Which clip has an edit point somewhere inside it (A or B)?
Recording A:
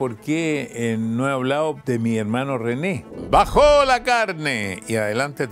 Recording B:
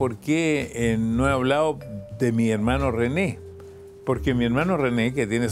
A